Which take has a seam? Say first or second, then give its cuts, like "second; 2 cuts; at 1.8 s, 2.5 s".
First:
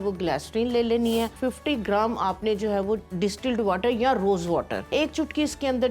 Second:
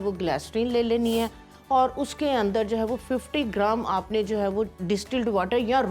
first; 2 cuts; at 1.3 s, 4.8 s